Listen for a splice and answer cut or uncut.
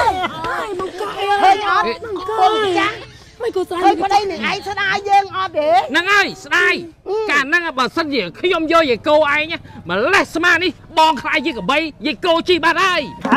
uncut